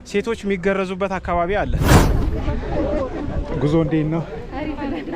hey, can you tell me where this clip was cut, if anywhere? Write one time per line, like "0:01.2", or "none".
0:02.0